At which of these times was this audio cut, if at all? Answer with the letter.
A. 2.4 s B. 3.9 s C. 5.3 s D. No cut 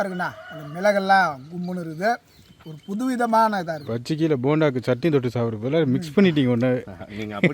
B